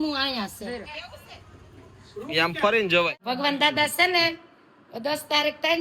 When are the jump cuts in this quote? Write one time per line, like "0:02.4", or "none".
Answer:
0:03.1